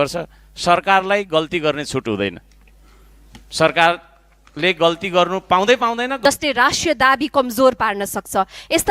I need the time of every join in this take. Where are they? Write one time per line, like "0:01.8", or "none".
0:06.1